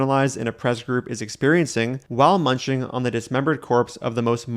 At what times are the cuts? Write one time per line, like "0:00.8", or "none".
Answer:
0:02.0